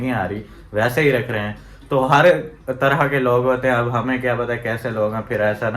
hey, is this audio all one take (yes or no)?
yes